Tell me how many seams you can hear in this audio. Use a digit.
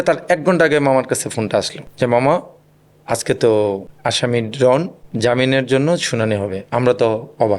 0